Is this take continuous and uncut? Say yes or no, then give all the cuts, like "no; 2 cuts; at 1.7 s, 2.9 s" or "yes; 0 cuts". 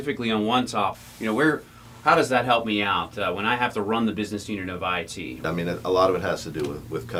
yes; 0 cuts